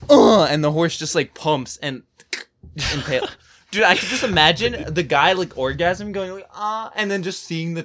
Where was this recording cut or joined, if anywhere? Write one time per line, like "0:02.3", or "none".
none